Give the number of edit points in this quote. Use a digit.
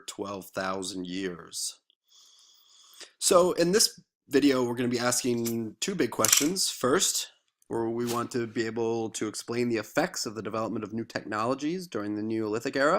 1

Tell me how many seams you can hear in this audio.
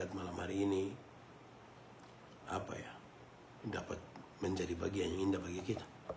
0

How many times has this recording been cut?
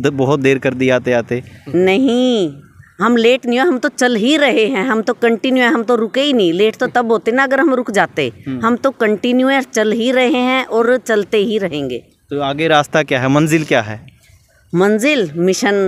0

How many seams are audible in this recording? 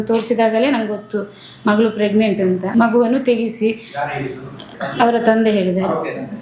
2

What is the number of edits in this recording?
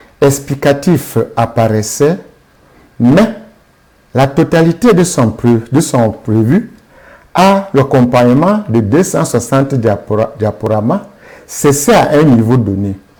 0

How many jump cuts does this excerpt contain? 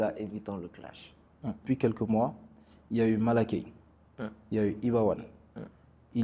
1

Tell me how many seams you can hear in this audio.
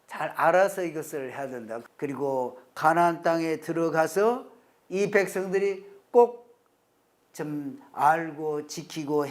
1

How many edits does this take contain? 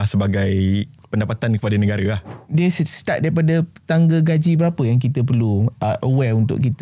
2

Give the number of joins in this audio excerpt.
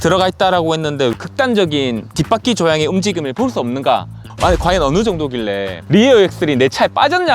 2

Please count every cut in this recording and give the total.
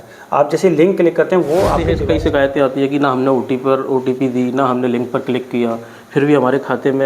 1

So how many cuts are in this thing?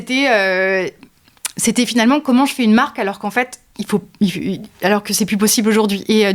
0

